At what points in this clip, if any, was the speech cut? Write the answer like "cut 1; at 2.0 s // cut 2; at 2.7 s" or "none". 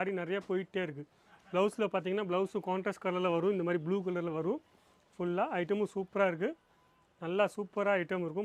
none